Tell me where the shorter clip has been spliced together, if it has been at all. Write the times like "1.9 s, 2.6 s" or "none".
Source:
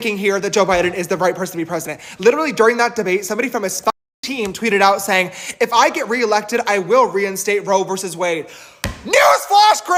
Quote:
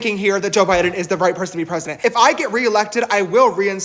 1.9 s